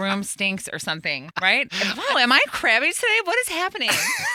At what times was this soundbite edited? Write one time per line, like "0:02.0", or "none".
0:01.4